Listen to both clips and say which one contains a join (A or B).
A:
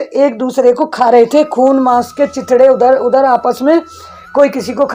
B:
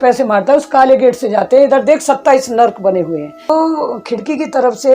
B